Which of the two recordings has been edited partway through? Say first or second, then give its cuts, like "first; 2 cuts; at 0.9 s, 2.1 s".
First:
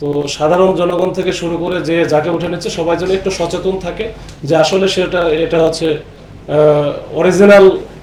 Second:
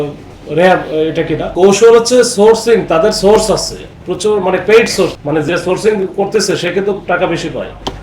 second; 2 cuts; at 1.5 s, 5.1 s